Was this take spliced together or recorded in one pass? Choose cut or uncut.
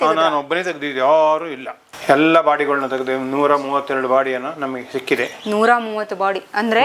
uncut